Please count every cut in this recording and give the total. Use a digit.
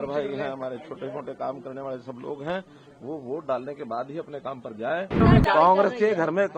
1